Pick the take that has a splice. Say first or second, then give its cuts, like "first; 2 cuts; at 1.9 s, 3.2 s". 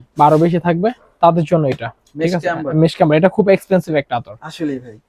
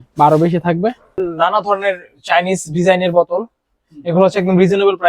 second; 1 cut; at 1.2 s